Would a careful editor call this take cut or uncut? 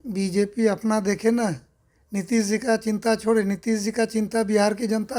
uncut